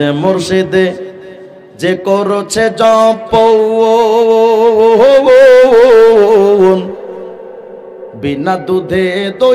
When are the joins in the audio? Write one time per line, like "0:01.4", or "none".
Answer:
none